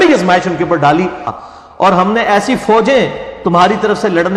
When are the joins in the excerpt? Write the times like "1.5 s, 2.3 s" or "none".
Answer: 1.4 s